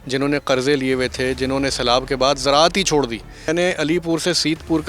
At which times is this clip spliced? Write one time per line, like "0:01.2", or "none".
0:03.5